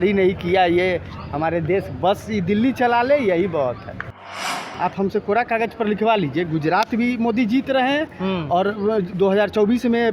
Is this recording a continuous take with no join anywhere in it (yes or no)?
no